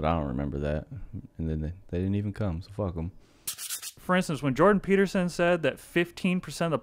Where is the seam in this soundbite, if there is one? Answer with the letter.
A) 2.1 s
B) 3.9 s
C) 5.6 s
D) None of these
B